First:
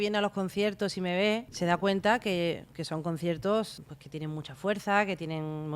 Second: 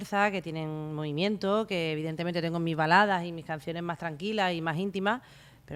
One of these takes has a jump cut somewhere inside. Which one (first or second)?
first